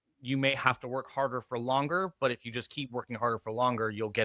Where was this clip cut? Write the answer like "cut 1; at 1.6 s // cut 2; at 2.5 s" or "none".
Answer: none